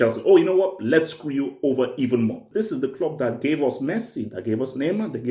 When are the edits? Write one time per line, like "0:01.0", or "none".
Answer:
0:02.4